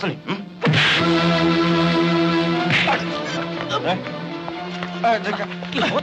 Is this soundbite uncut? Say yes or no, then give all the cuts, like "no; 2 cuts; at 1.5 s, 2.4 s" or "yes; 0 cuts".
yes; 0 cuts